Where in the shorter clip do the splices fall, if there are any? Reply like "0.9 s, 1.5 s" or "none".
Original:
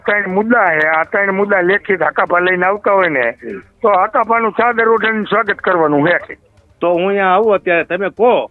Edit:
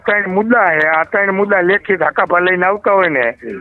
none